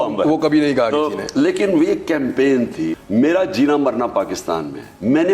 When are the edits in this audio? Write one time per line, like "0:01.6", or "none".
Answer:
0:02.9